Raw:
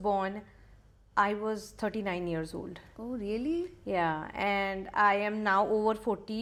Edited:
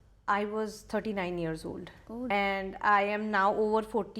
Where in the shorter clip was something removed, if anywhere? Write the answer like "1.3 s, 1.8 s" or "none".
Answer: 2.3 s

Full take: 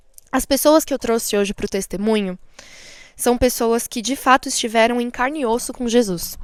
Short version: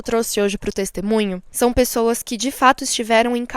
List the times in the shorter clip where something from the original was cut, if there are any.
1.4 s

